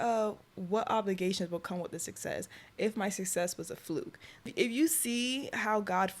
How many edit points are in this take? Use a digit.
1